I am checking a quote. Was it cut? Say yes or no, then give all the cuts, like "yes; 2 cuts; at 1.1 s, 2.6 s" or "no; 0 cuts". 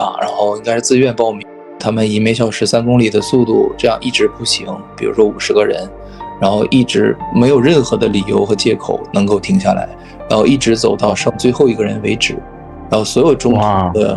yes; 1 cut; at 1.8 s